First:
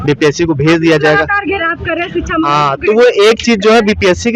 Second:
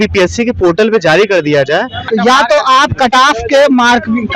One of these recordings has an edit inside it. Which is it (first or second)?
second